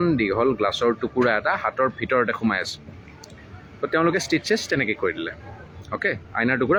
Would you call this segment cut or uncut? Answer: uncut